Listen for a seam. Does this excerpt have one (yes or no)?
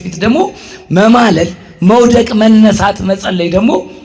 no